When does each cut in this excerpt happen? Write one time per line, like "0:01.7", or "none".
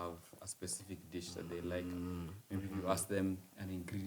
none